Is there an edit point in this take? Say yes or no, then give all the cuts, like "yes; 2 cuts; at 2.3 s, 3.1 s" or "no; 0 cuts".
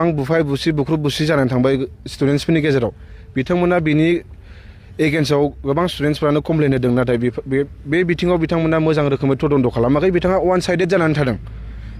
no; 0 cuts